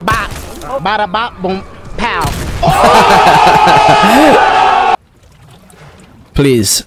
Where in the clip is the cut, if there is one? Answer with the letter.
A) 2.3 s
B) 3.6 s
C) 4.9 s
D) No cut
C